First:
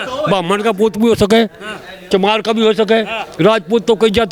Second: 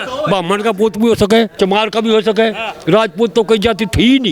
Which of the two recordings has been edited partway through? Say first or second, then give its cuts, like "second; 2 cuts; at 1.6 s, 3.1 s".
second; 1 cut; at 1.5 s